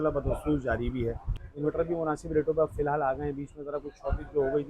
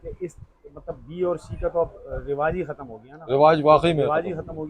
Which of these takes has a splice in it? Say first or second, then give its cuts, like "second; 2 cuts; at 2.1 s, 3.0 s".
first; 1 cut; at 1.3 s